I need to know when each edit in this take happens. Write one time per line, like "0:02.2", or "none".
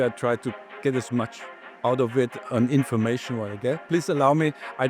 0:03.8